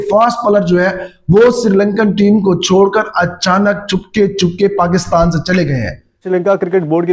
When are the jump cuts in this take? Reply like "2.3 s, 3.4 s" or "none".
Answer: 6.2 s